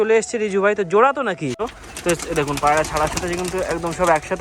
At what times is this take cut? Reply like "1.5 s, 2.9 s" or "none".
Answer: 1.6 s